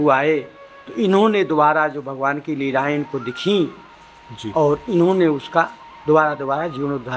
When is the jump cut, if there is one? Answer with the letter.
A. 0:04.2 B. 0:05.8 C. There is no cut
C